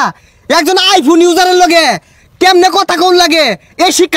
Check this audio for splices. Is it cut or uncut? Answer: uncut